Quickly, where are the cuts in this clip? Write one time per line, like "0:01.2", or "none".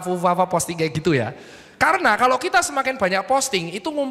none